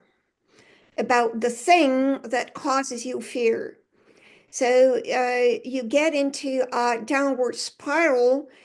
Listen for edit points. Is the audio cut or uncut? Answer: uncut